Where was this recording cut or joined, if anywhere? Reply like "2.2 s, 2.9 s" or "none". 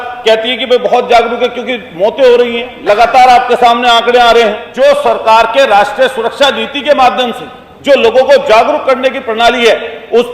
4.6 s